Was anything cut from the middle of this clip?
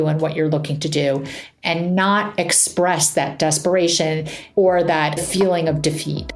yes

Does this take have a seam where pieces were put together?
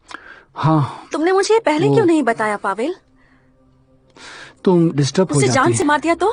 no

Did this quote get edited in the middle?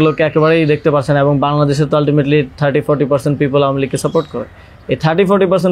no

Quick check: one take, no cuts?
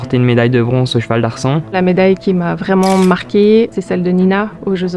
no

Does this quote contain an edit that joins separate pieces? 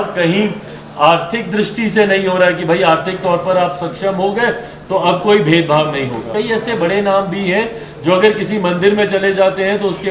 yes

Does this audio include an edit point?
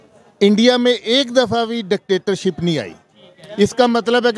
no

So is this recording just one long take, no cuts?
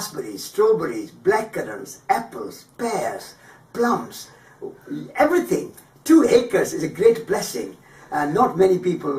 no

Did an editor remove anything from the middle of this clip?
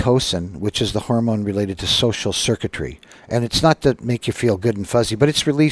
no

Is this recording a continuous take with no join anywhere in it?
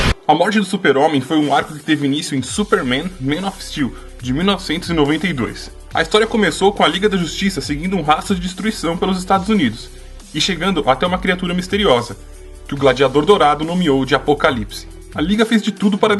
yes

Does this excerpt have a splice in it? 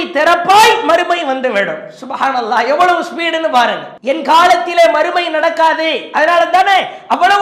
yes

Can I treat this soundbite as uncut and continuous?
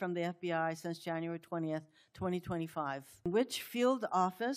no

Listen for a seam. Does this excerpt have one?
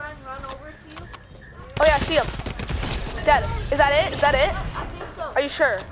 no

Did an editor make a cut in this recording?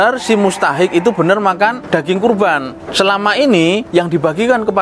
yes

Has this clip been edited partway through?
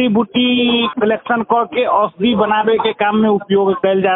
yes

